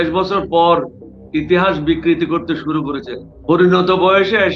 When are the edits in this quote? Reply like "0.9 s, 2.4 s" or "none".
none